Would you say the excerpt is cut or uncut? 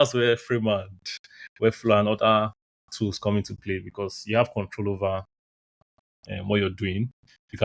uncut